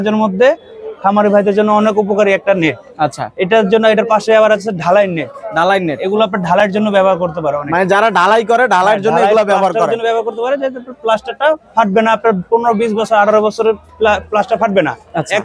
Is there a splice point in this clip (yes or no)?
no